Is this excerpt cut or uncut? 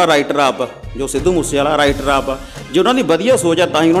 uncut